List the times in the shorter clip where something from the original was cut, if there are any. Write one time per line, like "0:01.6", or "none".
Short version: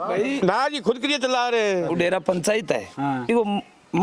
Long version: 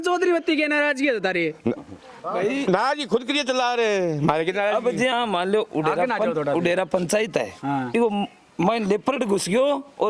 0:01.9